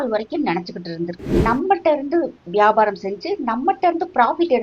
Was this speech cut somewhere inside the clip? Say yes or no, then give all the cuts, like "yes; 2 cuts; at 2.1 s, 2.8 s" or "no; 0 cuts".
yes; 1 cut; at 1.3 s